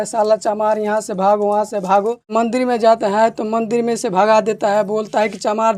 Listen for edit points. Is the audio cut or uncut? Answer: cut